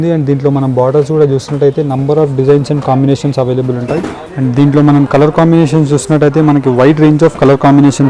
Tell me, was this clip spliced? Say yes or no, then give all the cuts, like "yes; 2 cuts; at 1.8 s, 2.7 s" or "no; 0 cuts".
yes; 1 cut; at 4.2 s